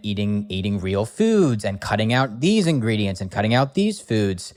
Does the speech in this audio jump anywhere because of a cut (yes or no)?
no